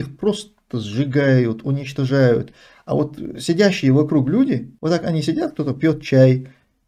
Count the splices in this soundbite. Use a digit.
1